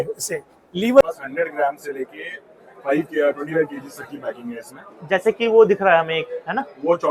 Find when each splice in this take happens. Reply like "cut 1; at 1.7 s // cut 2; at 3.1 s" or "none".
cut 1; at 1.0 s